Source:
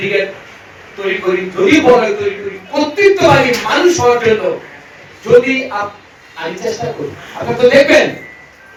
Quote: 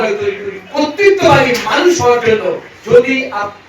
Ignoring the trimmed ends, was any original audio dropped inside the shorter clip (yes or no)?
yes